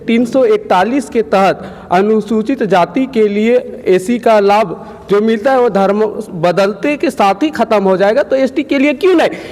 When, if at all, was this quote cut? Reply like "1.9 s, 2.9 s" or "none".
none